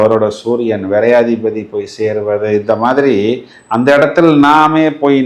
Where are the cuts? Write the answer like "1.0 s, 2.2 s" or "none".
none

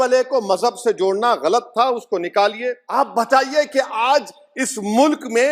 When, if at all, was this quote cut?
2.8 s

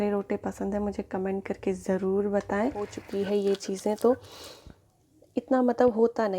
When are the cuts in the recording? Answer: 3.0 s

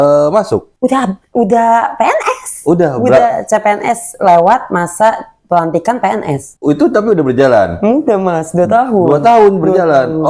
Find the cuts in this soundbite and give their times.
none

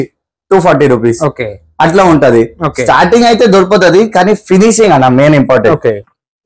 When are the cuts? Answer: none

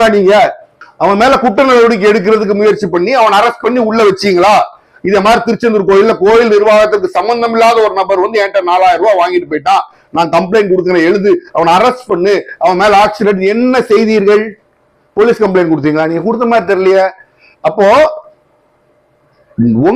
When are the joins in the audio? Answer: none

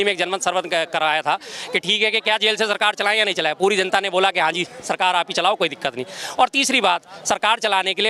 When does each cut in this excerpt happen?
none

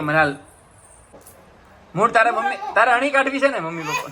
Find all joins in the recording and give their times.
1.1 s

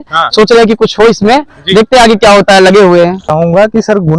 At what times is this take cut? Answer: 3.3 s

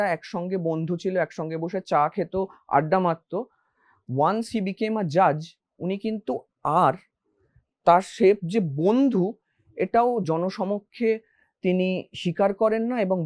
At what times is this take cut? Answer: none

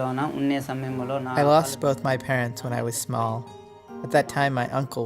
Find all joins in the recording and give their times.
1.3 s

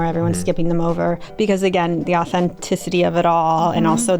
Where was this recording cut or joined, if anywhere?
1.3 s

